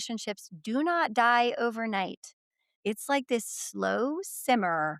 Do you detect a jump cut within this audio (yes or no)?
yes